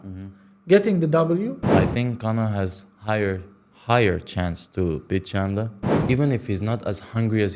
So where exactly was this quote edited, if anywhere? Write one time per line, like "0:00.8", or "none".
0:01.6
0:05.8

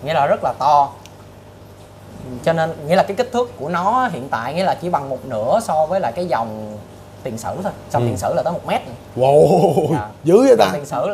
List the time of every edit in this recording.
none

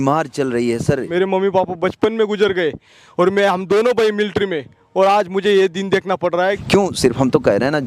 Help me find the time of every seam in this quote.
0:01.1
0:06.6

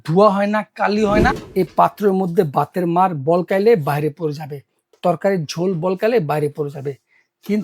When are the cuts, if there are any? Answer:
0:01.4

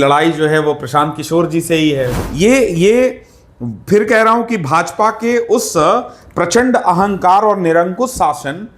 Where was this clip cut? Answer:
0:02.1

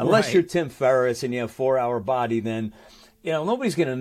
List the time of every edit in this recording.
none

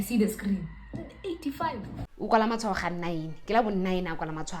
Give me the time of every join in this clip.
0:01.9

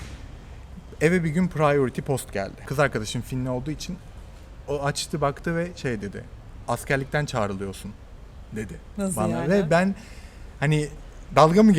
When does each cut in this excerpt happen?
0:02.6

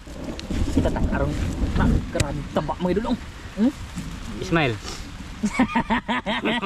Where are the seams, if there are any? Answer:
0:02.0

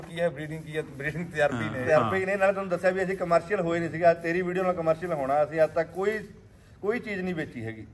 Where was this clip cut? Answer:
none

